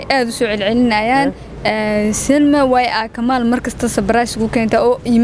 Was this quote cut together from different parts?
no; 0 cuts

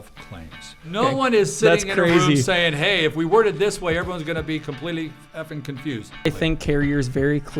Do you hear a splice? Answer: yes; 2 cuts; at 1.0 s, 6.2 s

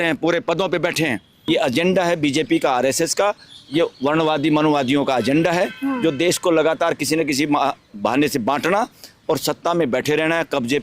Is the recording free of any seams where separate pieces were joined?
no; 1 cut; at 1.4 s

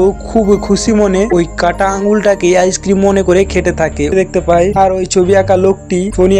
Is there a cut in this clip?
yes; 1 cut; at 4.1 s

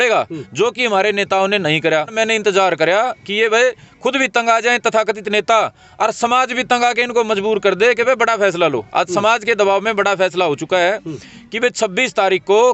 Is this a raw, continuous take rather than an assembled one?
no; 1 cut; at 2.1 s

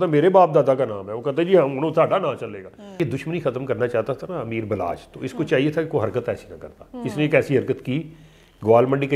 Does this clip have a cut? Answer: yes; 1 cut; at 3.0 s

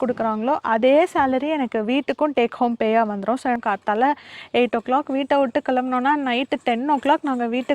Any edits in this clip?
yes; 1 cut; at 3.6 s

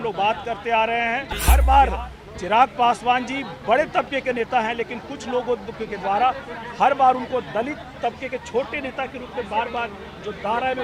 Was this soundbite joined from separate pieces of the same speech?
yes; 1 cut; at 1.3 s

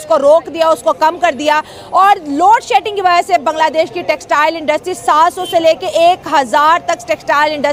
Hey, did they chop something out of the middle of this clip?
no; 0 cuts

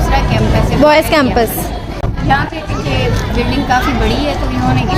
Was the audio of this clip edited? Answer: no; 0 cuts

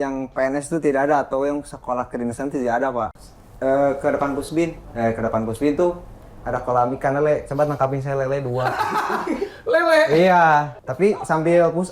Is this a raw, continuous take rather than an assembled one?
no; 2 cuts; at 3.2 s, 10.8 s

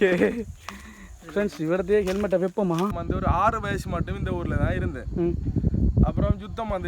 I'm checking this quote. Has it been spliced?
yes; 1 cut; at 3.0 s

